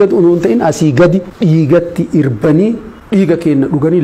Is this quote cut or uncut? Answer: cut